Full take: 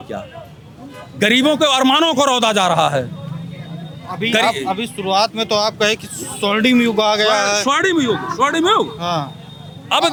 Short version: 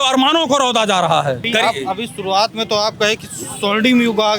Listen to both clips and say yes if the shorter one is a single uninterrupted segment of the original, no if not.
no